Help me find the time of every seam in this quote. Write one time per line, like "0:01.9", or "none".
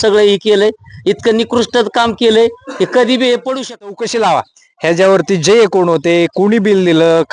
0:04.0

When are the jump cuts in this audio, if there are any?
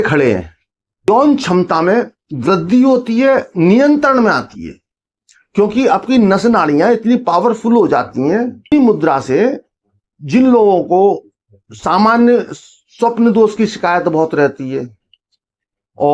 0:01.1
0:08.7

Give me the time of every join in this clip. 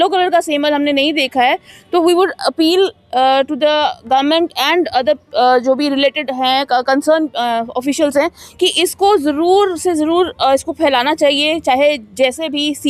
none

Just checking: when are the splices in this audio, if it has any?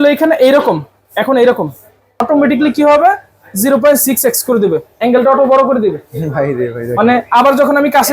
0:02.2

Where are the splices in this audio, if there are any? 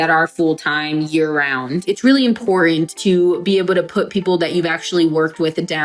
0:01.8
0:02.9

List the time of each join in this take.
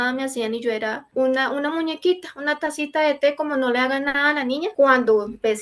0:04.7

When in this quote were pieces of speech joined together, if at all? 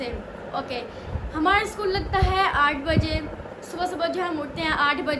none

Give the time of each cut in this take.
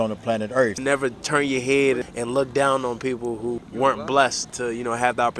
0:00.8
0:02.1
0:03.6
0:04.5

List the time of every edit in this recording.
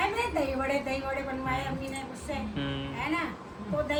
none

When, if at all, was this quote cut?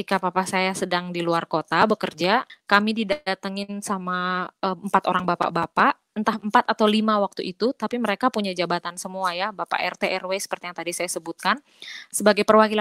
0:02.5

